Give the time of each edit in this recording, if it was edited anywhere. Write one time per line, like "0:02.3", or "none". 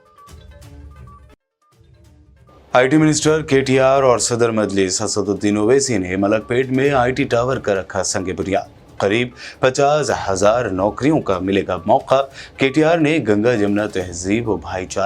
0:01.1